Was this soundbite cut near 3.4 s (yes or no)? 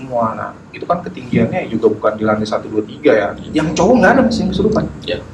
yes